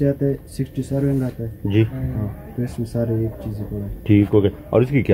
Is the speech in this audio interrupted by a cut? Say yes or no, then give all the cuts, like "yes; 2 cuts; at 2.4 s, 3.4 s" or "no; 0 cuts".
no; 0 cuts